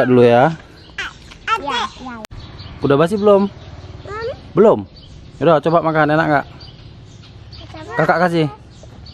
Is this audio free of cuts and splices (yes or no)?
no